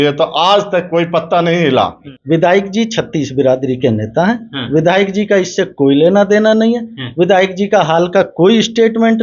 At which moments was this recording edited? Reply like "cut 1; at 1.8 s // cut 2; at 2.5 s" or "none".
cut 1; at 2.1 s